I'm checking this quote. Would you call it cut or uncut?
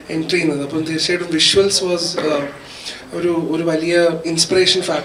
uncut